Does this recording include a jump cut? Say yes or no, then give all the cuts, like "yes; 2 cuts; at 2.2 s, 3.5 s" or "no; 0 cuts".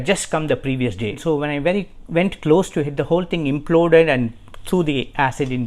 yes; 1 cut; at 1.2 s